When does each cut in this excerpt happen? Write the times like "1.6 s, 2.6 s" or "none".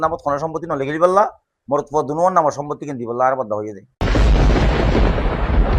3.8 s